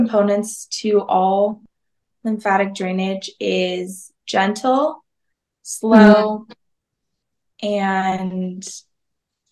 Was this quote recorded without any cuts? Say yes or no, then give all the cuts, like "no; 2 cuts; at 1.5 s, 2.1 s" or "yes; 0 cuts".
yes; 0 cuts